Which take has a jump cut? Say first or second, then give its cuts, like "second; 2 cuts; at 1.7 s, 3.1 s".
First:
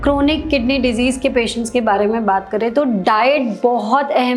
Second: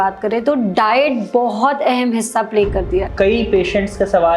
second; 1 cut; at 3.1 s